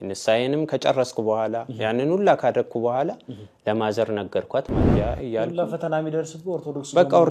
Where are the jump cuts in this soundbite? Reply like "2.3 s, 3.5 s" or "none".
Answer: 4.9 s